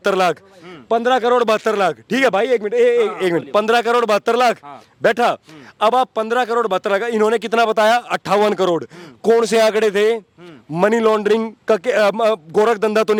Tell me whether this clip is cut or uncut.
uncut